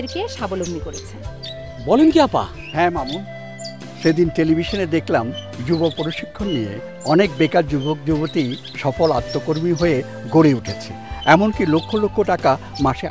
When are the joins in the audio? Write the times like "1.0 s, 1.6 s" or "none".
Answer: none